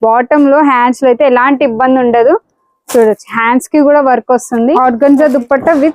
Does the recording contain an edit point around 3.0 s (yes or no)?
no